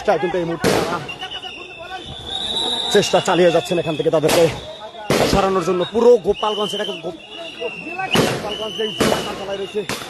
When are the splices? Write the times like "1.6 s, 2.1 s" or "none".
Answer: none